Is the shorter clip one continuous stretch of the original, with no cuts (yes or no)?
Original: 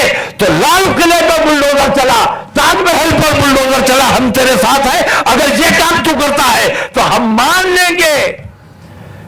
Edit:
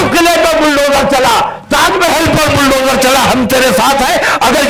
yes